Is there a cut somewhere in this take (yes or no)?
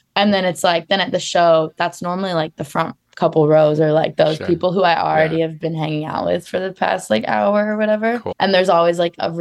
yes